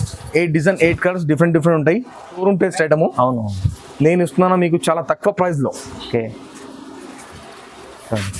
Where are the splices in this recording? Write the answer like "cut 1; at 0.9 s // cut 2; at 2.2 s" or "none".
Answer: cut 1; at 2.4 s